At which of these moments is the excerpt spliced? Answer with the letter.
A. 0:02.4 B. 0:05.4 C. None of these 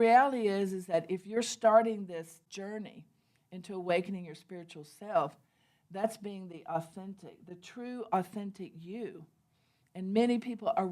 A